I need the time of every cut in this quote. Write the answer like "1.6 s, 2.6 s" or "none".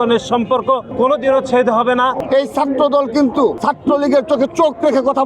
0.9 s, 2.2 s, 3.6 s